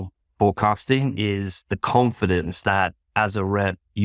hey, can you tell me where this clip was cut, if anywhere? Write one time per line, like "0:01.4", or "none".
none